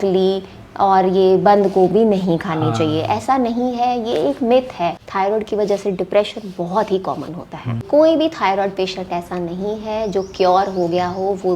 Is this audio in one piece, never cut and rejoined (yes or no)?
no